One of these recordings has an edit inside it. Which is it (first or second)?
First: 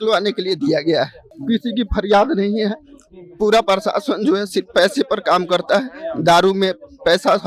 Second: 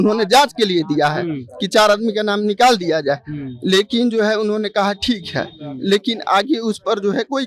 first